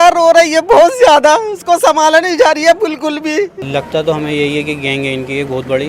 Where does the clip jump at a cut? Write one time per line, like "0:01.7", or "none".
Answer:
0:03.6